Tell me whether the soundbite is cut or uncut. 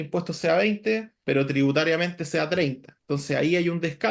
cut